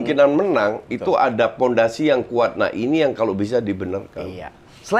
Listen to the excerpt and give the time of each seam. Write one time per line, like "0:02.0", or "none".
none